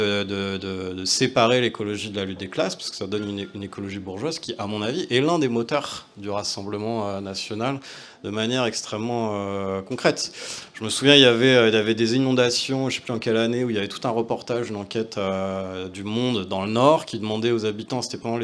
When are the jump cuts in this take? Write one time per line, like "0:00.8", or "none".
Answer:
none